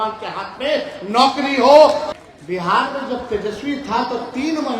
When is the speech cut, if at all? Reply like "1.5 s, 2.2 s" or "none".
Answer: 2.0 s